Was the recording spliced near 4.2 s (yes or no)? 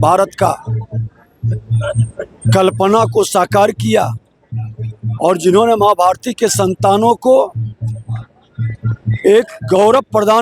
no